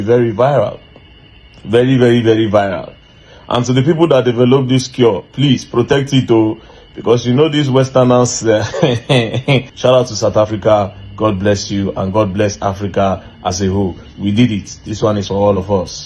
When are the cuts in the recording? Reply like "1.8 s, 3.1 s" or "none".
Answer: 9.7 s